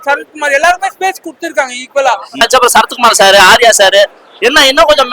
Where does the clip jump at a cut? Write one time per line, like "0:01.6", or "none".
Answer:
0:02.4

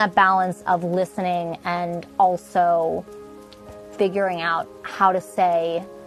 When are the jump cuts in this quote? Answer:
none

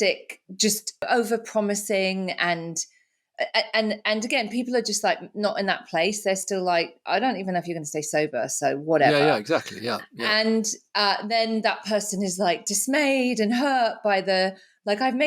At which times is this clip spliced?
0:01.1

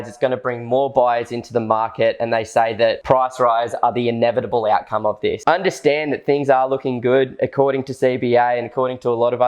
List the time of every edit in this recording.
0:03.0
0:05.4

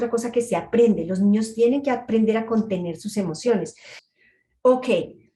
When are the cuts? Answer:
0:03.9

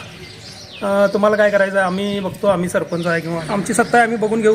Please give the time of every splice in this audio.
0:03.4

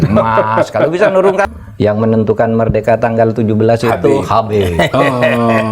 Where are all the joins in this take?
0:01.5

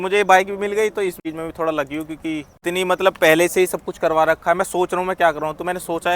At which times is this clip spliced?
0:01.2
0:02.5

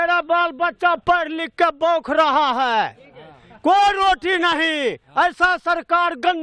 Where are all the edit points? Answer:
none

